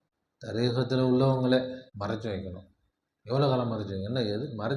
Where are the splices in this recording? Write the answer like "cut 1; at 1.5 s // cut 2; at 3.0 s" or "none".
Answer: cut 1; at 1.9 s